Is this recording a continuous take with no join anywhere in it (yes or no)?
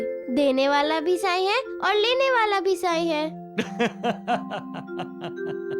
yes